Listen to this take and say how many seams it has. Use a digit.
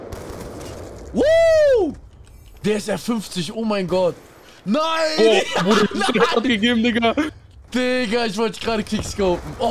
0